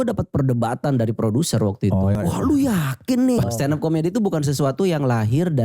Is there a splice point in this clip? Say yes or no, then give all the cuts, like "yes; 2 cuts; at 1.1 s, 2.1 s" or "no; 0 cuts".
yes; 2 cuts; at 2.2 s, 3.4 s